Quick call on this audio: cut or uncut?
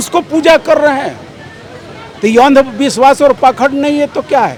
uncut